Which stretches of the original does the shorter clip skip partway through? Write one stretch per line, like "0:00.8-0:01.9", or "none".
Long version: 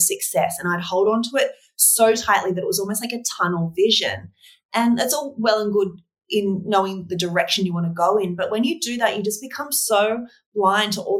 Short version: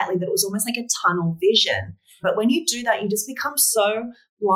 0:04.5-0:08.3